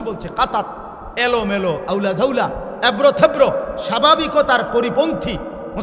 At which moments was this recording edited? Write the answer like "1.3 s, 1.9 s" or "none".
none